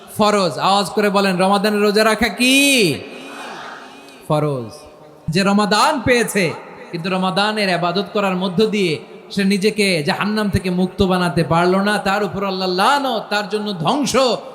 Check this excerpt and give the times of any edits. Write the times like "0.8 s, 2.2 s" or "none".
5.3 s